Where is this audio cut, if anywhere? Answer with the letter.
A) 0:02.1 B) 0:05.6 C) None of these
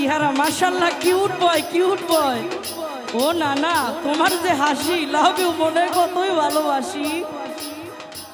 C